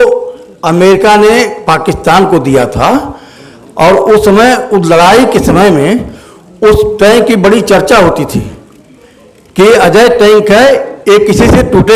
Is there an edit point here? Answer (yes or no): no